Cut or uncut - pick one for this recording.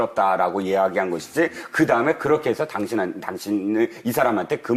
cut